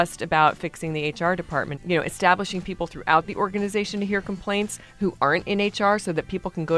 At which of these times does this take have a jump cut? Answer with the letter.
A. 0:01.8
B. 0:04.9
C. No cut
A